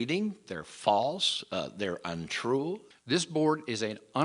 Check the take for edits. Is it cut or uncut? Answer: cut